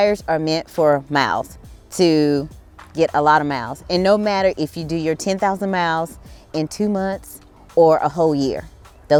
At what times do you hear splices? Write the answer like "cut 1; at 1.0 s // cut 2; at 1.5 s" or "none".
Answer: none